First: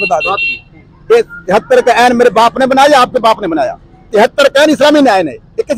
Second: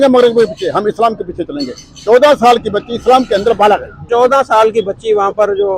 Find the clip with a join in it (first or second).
second